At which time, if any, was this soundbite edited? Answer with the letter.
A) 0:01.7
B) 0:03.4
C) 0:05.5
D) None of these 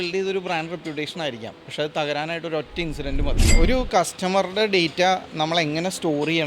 B